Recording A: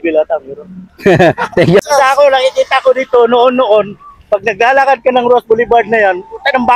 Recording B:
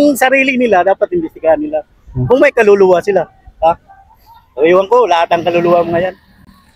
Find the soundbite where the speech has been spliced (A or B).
A